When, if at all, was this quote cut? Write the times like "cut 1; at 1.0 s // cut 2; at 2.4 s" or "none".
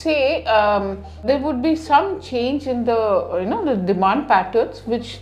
cut 1; at 1.2 s

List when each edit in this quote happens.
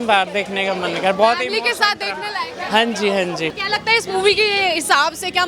cut 1; at 3.6 s

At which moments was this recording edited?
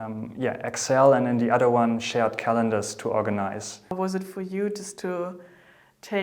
cut 1; at 3.9 s

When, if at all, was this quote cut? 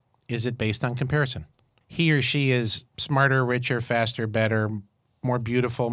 cut 1; at 1.7 s

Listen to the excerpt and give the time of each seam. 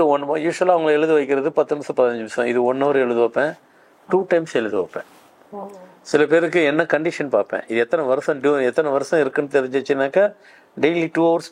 none

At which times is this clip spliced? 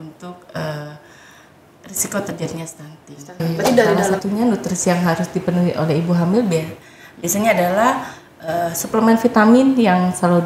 cut 1; at 4.2 s

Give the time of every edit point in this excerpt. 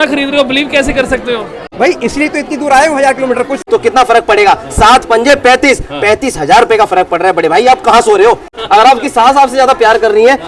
cut 1; at 1.6 s // cut 2; at 3.6 s // cut 3; at 8.6 s

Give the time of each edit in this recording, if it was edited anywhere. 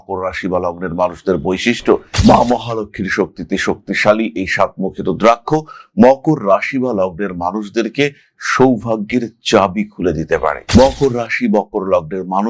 cut 1; at 2.1 s

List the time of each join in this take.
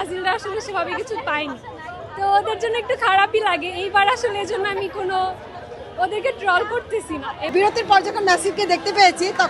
cut 1; at 7.5 s

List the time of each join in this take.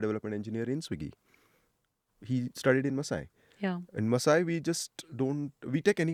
none

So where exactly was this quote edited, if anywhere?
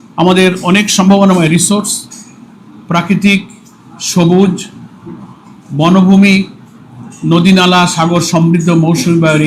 none

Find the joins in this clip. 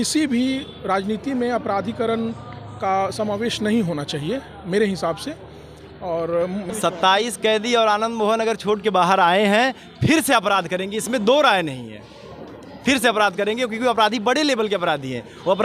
cut 1; at 6.7 s

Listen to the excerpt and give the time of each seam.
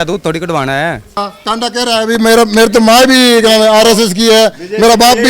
cut 1; at 1.2 s

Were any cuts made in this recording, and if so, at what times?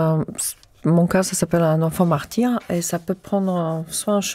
none

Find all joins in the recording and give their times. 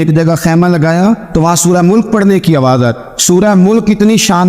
cut 1; at 1.2 s // cut 2; at 3.0 s

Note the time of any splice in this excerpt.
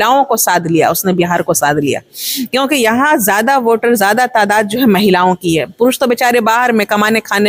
none

